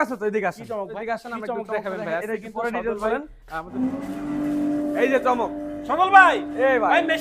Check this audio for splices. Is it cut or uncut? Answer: cut